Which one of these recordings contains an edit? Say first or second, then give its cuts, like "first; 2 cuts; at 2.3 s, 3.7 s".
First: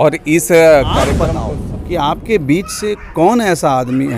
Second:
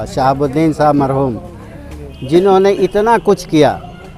first; 1 cut; at 1.2 s